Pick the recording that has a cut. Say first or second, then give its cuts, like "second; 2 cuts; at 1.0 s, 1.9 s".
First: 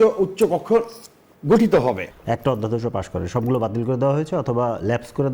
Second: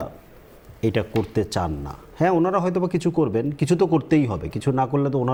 first; 1 cut; at 2.1 s